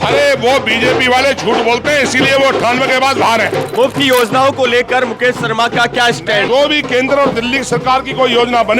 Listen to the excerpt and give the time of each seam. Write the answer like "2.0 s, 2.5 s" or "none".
3.7 s, 6.4 s